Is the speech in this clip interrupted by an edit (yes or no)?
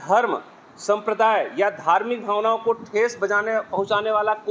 no